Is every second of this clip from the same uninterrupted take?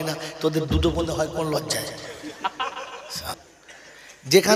no; 1 cut; at 3.3 s

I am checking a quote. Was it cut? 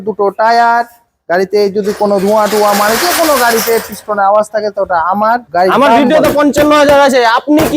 yes; 1 cut; at 5.4 s

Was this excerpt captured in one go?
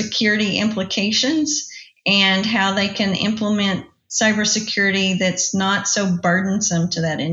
yes; 0 cuts

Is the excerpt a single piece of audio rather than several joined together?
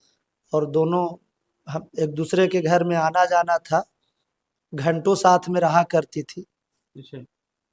yes; 0 cuts

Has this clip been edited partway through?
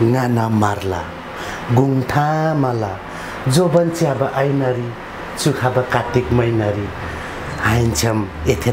no; 0 cuts

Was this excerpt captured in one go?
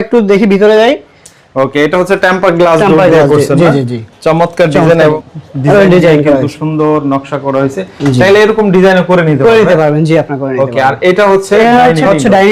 yes; 0 cuts

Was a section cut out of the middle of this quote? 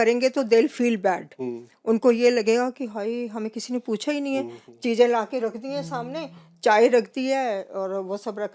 no; 0 cuts

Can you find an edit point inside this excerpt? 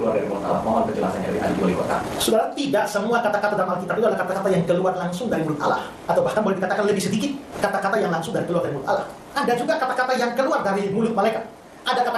no; 0 cuts

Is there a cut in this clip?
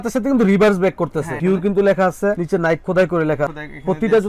yes; 1 cut; at 1.3 s

